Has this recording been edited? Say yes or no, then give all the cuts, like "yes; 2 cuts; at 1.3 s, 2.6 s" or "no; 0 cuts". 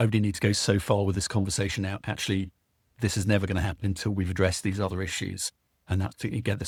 no; 0 cuts